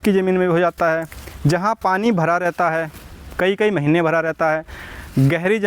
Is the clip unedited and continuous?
yes; 0 cuts

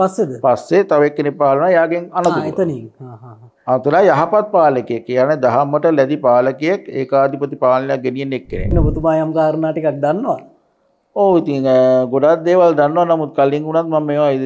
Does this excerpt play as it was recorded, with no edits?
no; 1 cut; at 8.7 s

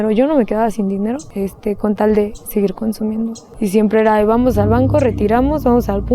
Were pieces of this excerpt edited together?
yes; 2 cuts; at 1.3 s, 3.4 s

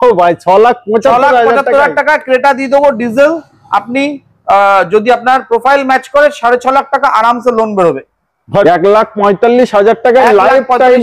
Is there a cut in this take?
yes; 1 cut; at 8.6 s

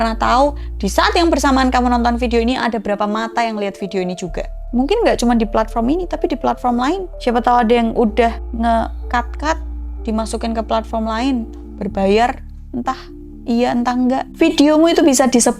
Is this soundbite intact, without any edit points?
yes; 0 cuts

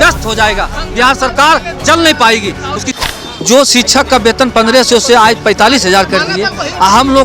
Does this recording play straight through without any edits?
no; 1 cut; at 2.9 s

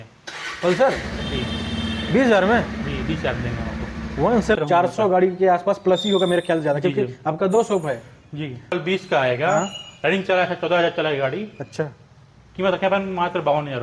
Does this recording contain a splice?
yes; 2 cuts; at 4.6 s, 8.8 s

